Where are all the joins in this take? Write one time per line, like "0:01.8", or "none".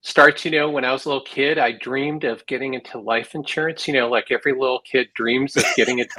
none